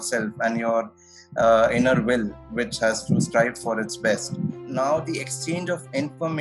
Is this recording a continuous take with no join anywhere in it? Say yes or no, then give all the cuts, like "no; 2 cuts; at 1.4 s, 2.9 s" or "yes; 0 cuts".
no; 1 cut; at 4.6 s